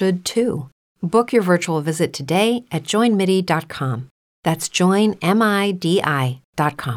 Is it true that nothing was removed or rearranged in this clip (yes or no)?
yes